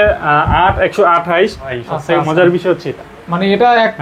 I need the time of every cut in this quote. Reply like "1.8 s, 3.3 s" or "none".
1.8 s

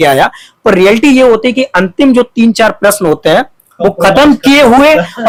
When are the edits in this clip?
none

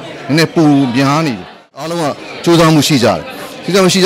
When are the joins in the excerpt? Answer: 1.7 s

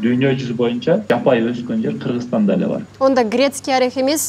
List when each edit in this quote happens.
1.1 s, 2.9 s

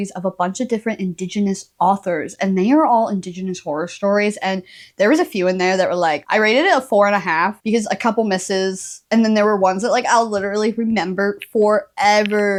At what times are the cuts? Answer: none

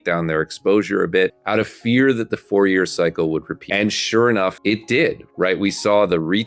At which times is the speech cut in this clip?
1.4 s, 3.6 s, 4.6 s

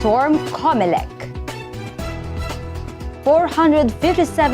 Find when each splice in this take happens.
1.1 s, 3.2 s

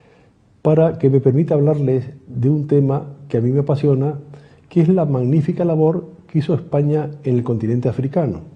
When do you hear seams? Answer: none

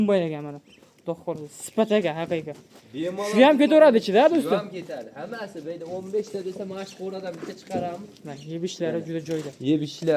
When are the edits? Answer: none

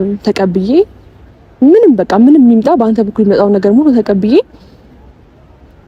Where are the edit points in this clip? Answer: none

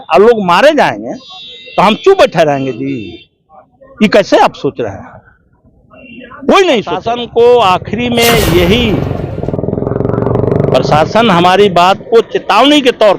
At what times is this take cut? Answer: 7.1 s

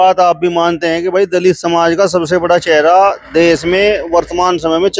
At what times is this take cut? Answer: none

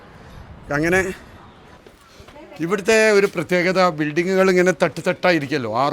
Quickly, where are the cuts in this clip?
1.9 s

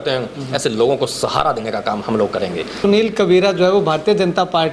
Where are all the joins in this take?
2.8 s

